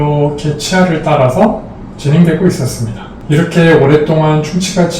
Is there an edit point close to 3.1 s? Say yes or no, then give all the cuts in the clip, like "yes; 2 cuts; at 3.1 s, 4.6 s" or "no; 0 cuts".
yes; 1 cut; at 3.1 s